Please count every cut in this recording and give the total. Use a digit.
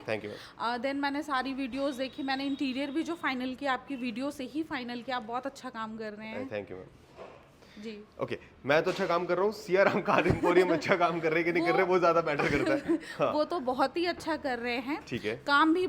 0